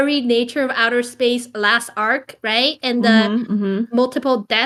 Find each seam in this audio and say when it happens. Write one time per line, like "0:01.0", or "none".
none